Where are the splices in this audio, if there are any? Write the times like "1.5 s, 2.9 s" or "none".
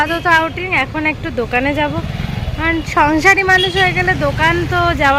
none